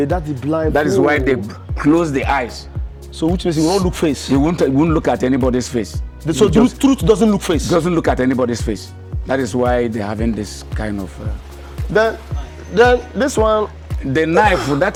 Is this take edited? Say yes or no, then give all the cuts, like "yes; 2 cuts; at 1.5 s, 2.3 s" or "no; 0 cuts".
no; 0 cuts